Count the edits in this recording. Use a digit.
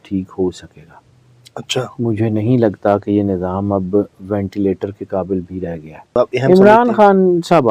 1